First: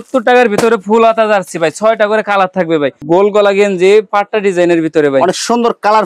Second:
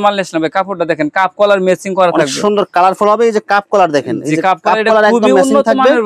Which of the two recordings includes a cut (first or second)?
first